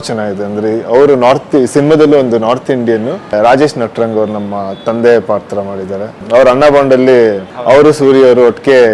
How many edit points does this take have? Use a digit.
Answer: 2